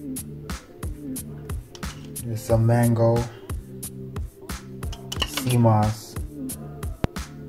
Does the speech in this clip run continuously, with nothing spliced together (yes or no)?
yes